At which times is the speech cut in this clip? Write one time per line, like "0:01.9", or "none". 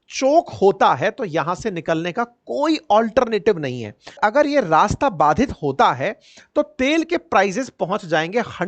0:04.2